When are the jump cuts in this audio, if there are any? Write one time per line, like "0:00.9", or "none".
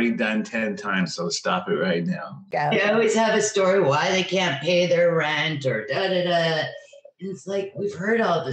0:02.5